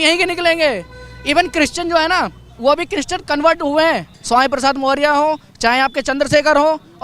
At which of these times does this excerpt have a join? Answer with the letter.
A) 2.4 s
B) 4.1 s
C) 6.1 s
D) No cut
B